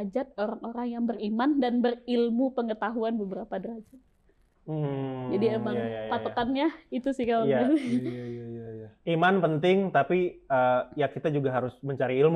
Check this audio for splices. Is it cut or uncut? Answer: uncut